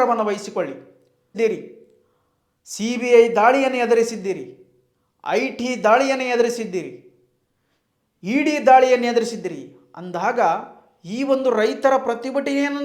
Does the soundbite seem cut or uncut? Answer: cut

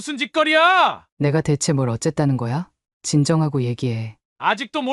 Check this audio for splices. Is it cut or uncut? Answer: cut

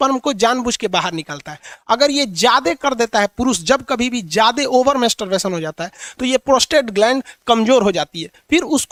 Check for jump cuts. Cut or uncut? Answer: uncut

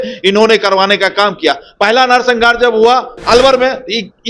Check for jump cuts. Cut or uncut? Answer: cut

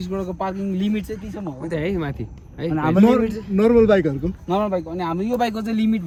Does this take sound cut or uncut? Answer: uncut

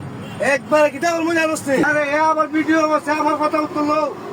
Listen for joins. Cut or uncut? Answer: cut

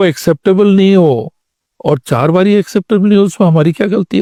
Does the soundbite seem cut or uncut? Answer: uncut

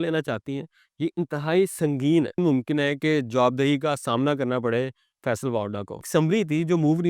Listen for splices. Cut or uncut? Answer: cut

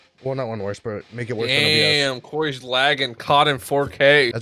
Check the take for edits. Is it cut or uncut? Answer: uncut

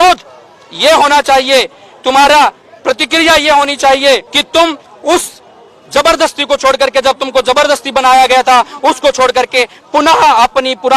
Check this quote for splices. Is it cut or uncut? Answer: cut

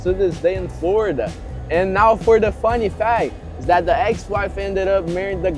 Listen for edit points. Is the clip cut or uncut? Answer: uncut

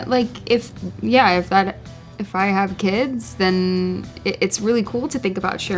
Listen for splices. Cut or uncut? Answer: uncut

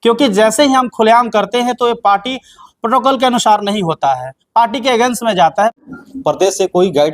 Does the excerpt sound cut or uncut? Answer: cut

